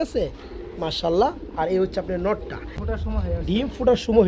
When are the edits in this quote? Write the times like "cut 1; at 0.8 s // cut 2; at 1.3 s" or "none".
cut 1; at 2.7 s